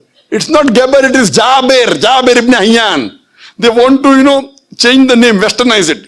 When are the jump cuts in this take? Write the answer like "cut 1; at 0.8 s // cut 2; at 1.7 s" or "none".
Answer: none